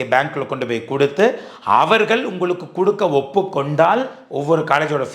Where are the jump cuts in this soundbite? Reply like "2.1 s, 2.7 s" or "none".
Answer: 4.1 s